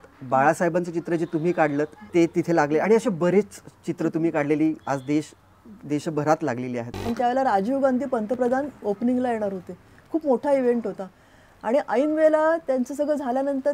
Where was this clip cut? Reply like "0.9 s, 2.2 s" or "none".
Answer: 2.0 s, 6.9 s